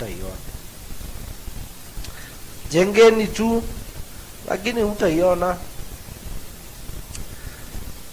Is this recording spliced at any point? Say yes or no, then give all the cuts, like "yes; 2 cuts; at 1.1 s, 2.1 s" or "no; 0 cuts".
no; 0 cuts